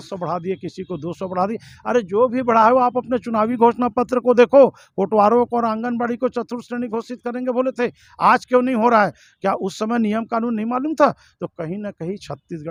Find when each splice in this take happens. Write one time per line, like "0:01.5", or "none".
none